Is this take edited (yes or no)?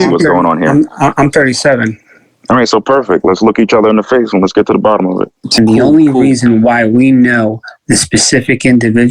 yes